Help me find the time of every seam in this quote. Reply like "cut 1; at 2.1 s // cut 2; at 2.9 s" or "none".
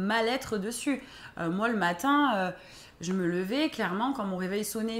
none